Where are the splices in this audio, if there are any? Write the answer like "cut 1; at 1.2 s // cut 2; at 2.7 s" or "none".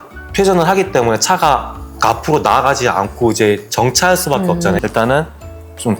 cut 1; at 4.8 s